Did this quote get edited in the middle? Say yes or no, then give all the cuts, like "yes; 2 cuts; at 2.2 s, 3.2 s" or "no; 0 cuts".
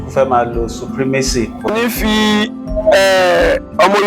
yes; 1 cut; at 1.7 s